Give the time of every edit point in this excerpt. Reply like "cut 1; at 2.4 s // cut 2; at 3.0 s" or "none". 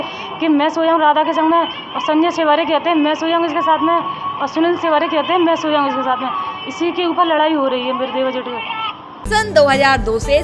cut 1; at 9.1 s